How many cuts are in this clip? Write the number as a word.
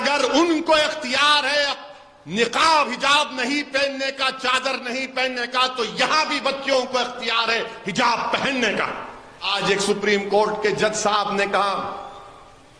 one